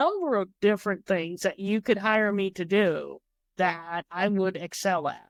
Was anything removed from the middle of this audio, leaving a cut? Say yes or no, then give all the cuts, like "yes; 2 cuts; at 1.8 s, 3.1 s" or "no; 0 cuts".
no; 0 cuts